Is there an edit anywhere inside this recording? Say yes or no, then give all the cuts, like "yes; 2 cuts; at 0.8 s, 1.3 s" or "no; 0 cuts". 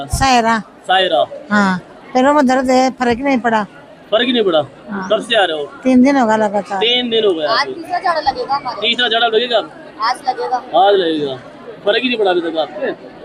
no; 0 cuts